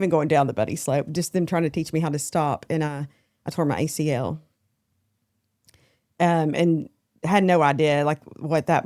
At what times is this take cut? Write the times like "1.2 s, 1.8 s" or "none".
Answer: none